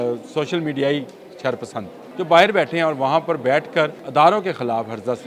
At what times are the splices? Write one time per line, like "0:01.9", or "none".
0:02.0
0:04.0